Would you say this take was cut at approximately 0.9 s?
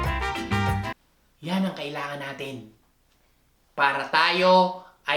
yes; 1 cut; at 0.9 s

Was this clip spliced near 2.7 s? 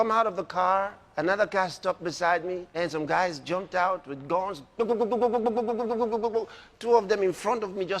yes; 2 cuts; at 1.0 s, 2.7 s

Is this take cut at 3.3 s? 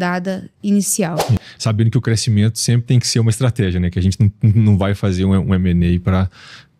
no; 1 cut; at 1.5 s

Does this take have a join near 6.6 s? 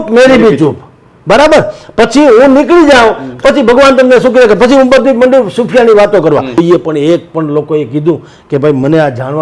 yes; 1 cut; at 6.6 s

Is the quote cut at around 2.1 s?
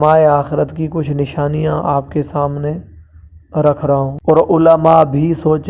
no; 1 cut; at 4.2 s

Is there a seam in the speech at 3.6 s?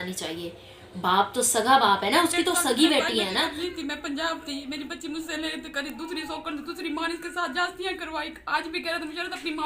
yes; 1 cut; at 3.6 s

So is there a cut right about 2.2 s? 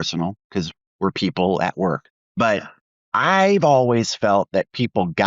yes; 1 cut; at 2.2 s

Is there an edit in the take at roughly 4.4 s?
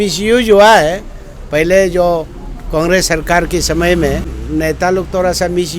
yes; 1 cut; at 4.4 s

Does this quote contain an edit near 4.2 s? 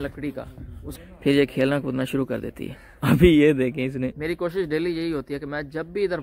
yes; 2 cuts; at 0.9 s, 4.2 s

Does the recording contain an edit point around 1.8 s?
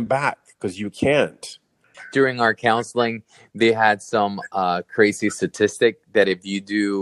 yes; 1 cut; at 1.8 s

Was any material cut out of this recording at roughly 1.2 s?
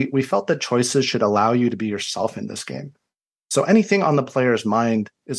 no; 0 cuts

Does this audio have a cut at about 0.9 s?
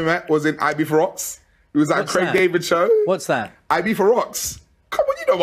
yes; 1 cut; at 0.9 s

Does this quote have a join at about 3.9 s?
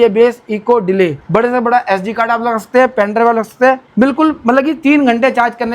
yes; 2 cuts; at 1.2 s, 3.9 s

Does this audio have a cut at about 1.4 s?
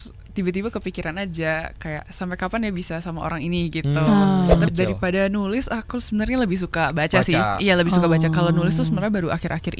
no; 1 cut; at 4.7 s

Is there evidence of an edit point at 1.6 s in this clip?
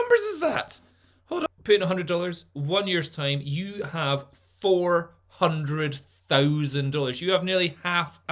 yes; 1 cut; at 1.6 s

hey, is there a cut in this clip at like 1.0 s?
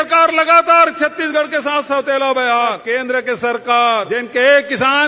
no; 2 cuts; at 2.8 s, 4.2 s

